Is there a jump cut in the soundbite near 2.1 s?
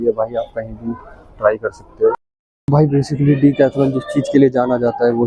yes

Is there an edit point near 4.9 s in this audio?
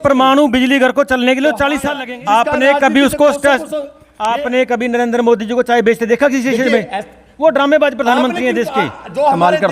no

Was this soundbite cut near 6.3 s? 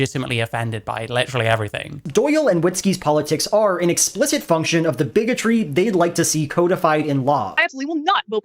no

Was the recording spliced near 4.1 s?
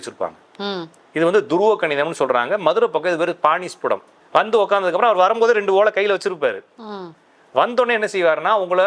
yes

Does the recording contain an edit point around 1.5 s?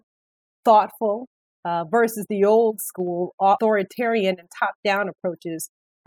no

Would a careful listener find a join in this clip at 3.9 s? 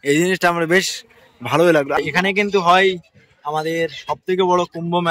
no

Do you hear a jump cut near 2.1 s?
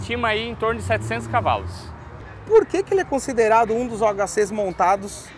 yes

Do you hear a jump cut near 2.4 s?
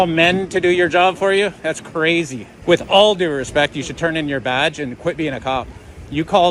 yes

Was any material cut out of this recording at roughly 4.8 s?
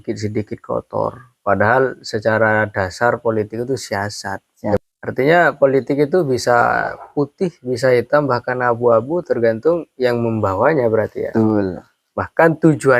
yes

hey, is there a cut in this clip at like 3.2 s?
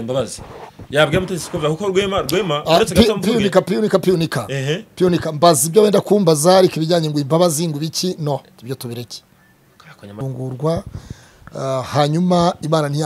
no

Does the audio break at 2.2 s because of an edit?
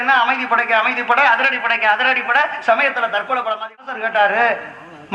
no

